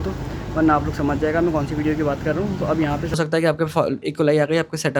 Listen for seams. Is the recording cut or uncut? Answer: cut